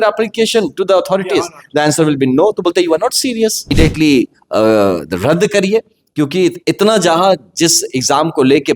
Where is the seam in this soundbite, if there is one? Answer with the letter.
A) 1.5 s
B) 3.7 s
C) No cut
B